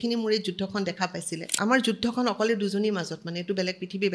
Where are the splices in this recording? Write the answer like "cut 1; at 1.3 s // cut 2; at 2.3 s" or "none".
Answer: cut 1; at 1.5 s